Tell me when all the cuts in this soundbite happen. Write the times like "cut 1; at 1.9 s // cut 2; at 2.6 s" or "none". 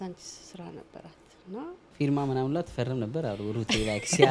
cut 1; at 1.8 s